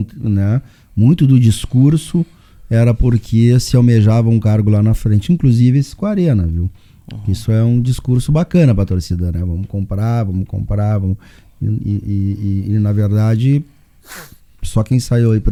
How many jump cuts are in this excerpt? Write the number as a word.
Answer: zero